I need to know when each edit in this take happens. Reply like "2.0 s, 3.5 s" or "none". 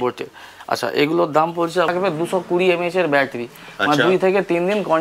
1.9 s